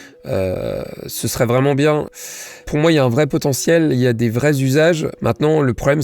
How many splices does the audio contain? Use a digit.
2